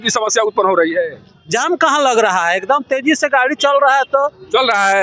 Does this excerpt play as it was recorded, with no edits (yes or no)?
yes